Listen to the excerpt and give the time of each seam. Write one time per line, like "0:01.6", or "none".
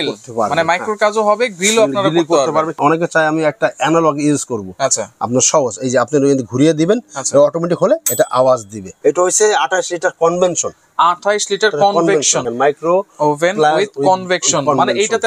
0:02.7
0:08.8
0:12.5

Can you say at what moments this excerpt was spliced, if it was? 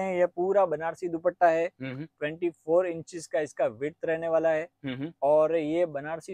none

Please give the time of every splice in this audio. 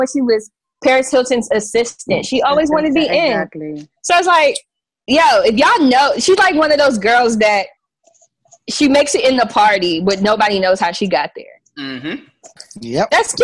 none

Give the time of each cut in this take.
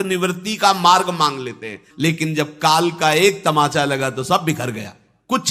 0:01.8

